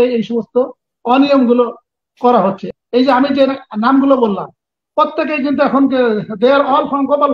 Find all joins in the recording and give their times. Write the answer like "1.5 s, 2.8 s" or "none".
2.7 s